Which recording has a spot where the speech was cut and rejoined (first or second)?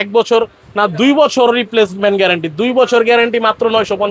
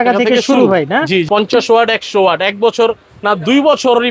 second